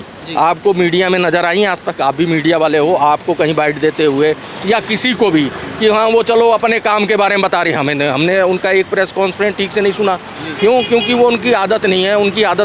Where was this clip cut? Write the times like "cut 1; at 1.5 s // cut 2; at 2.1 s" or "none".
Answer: none